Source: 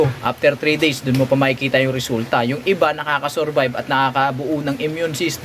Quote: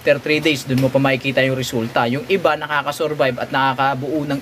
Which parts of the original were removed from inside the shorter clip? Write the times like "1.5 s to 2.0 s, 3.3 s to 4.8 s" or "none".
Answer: none